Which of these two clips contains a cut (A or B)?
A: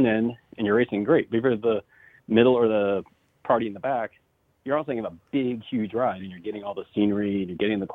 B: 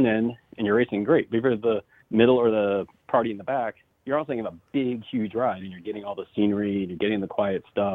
B